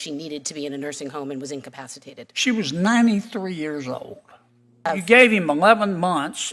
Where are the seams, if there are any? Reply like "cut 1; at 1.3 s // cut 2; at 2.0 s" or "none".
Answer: cut 1; at 4.9 s

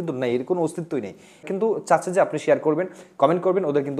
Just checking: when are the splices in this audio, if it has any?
cut 1; at 1.4 s

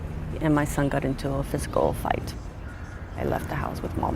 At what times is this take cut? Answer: cut 1; at 1.5 s

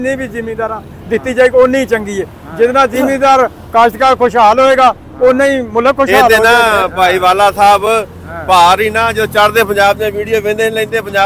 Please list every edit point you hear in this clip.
cut 1; at 6.4 s

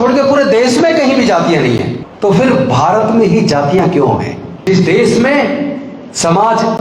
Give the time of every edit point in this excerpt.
cut 1; at 2.0 s // cut 2; at 4.6 s

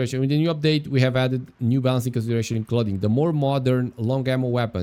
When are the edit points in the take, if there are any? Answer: none

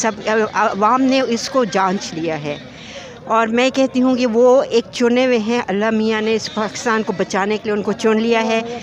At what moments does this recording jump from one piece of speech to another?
none

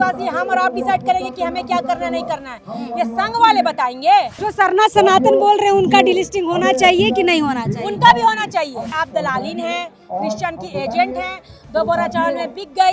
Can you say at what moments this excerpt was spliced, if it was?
cut 1; at 4.4 s // cut 2; at 8.9 s

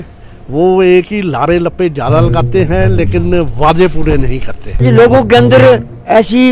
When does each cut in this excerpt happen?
cut 1; at 4.8 s

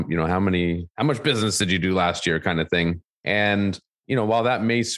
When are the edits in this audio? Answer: cut 1; at 3.9 s

